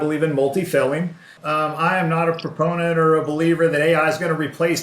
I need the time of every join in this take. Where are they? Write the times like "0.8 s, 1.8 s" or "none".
1.3 s